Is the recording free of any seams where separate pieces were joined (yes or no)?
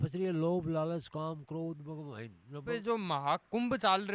no